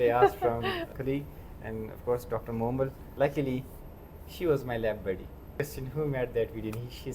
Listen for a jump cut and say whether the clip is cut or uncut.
cut